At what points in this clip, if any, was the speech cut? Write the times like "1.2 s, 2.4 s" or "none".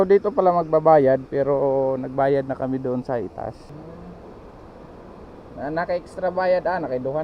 3.7 s